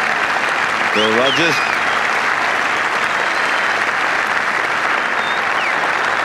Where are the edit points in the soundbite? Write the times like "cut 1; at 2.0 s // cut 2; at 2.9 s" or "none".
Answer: cut 1; at 2.5 s // cut 2; at 3.7 s // cut 3; at 5.3 s